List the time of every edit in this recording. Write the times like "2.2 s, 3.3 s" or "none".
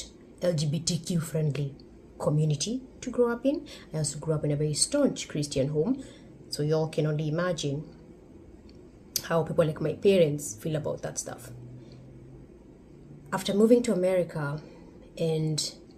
none

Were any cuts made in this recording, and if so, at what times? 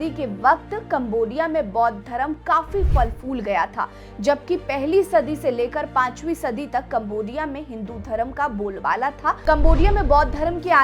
9.4 s

